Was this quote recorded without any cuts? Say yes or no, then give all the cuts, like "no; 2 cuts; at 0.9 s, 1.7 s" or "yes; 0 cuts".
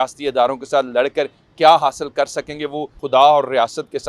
no; 1 cut; at 2.9 s